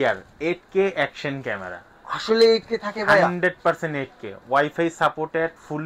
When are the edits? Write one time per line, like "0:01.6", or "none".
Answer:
none